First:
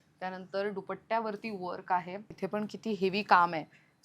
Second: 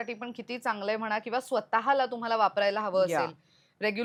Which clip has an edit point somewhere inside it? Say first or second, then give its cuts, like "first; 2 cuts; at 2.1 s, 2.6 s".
first; 1 cut; at 2.3 s